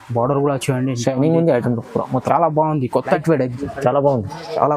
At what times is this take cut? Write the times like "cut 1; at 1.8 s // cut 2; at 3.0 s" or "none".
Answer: cut 1; at 3.2 s